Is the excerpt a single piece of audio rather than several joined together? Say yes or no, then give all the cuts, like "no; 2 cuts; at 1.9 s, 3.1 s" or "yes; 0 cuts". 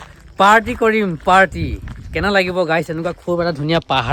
yes; 0 cuts